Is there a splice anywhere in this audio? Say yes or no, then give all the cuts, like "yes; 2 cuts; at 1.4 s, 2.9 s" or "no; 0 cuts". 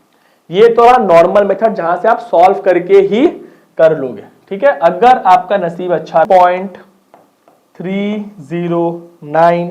yes; 1 cut; at 6.2 s